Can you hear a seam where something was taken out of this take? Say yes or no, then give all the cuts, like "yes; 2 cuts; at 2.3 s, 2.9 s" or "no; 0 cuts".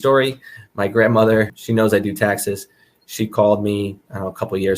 yes; 1 cut; at 1.5 s